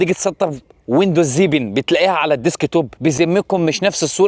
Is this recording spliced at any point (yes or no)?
no